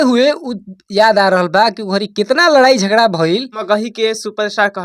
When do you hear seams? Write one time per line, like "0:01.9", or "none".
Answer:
0:03.5